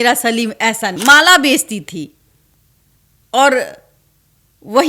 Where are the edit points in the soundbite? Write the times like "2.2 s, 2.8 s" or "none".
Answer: 1.0 s